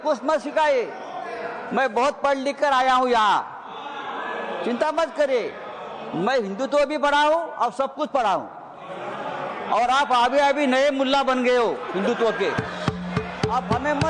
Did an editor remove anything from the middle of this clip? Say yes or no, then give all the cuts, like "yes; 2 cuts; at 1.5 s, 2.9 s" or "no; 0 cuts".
no; 0 cuts